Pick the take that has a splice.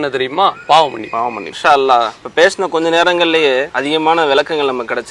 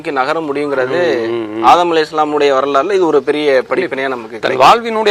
first; 3 cuts; at 1.5 s, 2.2 s, 3.7 s

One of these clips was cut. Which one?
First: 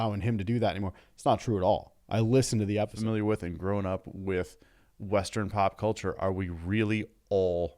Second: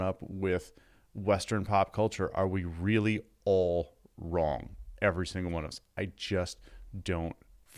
first; 1 cut; at 2.9 s

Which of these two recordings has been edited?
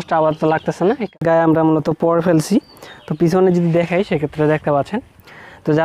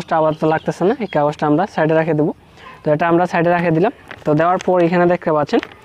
first; 1 cut; at 1.1 s

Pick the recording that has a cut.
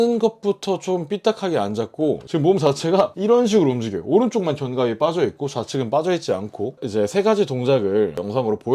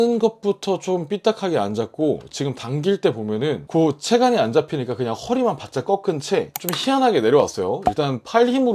first; 2 cuts; at 2.2 s, 6.8 s

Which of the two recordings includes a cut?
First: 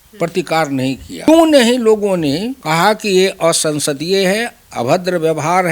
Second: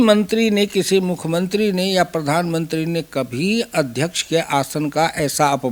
first; 2 cuts; at 1.3 s, 2.5 s

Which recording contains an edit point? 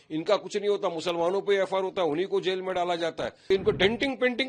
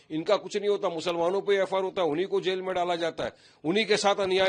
first; 1 cut; at 3.5 s

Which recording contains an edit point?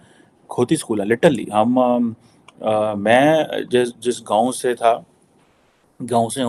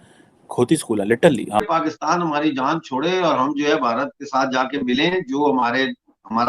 second; 1 cut; at 1.6 s

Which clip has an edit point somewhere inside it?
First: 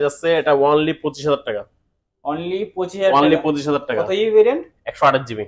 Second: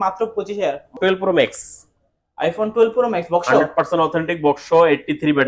second; 1 cut; at 1.0 s

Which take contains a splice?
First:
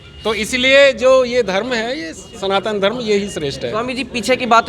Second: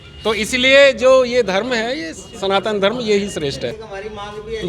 second; 1 cut; at 3.7 s

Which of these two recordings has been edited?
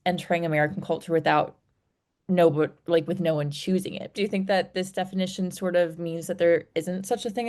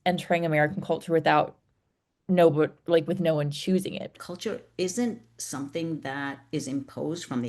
second; 1 cut; at 4.1 s

